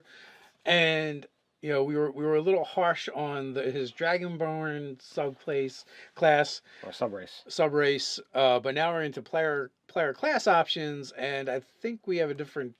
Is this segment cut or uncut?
uncut